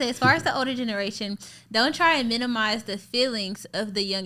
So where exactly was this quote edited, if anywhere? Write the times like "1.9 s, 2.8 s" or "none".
none